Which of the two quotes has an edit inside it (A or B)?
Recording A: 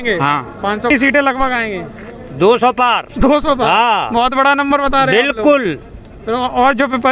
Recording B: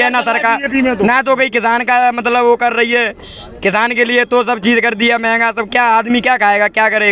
A